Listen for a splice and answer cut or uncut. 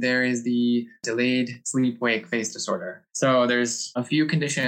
cut